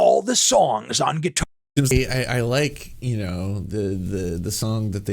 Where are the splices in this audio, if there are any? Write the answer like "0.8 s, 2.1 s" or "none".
1.9 s